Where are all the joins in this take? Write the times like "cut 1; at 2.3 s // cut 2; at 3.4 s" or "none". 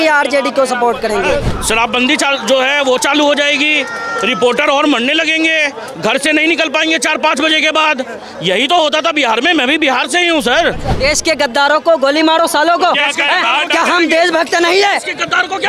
cut 1; at 1.5 s // cut 2; at 10.9 s